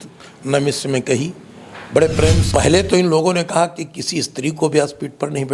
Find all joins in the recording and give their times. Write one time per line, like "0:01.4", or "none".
0:02.4